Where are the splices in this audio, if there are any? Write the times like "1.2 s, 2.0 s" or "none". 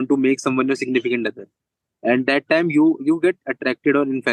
none